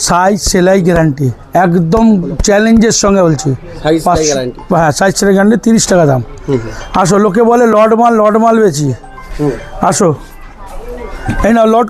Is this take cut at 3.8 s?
no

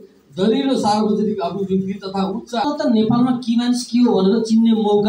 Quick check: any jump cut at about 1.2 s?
no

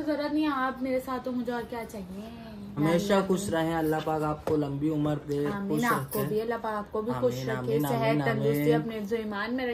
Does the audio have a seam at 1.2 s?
no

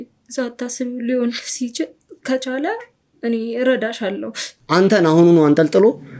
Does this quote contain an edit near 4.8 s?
yes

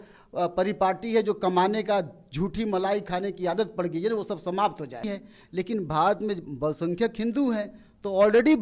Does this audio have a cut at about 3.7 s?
no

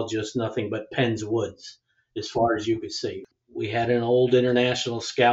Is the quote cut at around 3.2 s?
yes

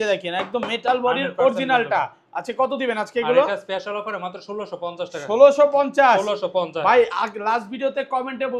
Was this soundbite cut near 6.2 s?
no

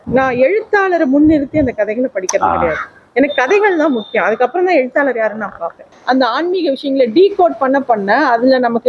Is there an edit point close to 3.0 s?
no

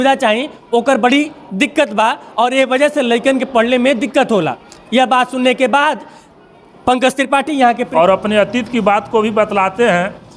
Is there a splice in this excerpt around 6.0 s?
no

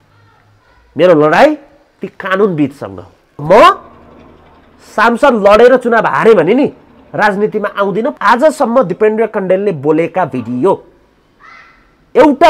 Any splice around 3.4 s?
yes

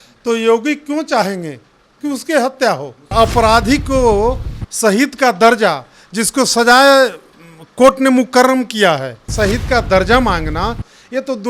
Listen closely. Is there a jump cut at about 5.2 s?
no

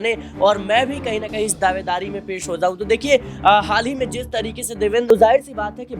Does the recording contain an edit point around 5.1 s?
yes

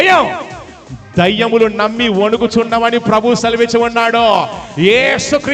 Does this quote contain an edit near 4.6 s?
no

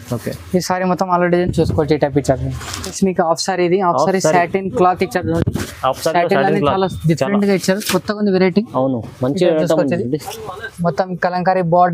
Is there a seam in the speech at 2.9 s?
yes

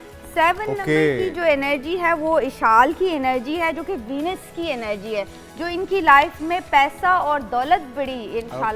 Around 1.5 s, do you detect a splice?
no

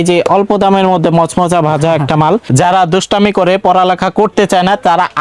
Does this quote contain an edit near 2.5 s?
yes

